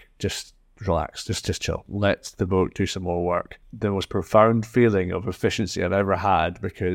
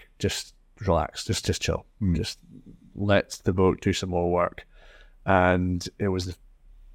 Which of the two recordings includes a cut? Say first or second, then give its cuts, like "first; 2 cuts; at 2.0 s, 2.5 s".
first; 2 cuts; at 1.9 s, 3.6 s